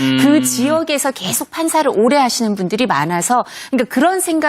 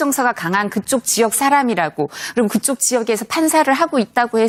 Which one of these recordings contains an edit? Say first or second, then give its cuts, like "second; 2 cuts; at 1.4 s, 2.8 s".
first; 1 cut; at 1.3 s